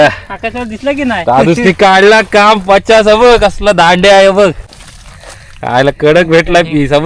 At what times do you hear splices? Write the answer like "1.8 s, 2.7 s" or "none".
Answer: 4.6 s